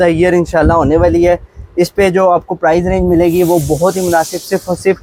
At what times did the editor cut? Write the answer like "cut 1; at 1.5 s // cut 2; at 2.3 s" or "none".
none